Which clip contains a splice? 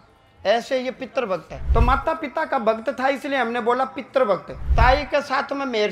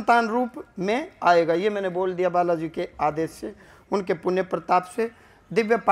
first; 2 cuts; at 1.6 s, 4.6 s

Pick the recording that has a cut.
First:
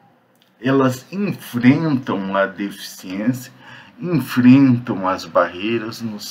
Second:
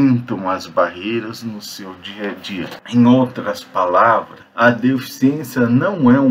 second; 2 cuts; at 2.7 s, 4.4 s

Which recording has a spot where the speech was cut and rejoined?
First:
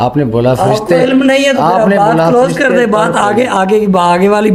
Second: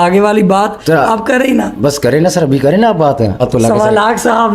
second; 1 cut; at 3.4 s

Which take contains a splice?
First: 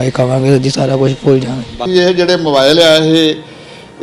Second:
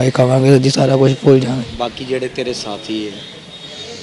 first; 1 cut; at 1.8 s

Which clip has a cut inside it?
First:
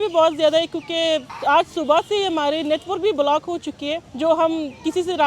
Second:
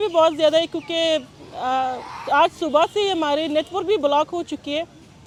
first; 2 cuts; at 1.3 s, 4.1 s

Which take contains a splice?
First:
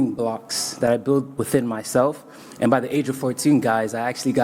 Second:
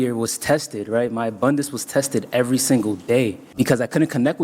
second; 1 cut; at 3.5 s

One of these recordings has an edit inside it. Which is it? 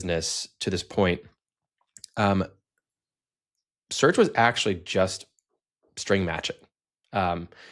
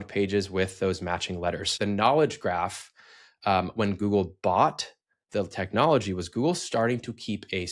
second; 1 cut; at 1.8 s

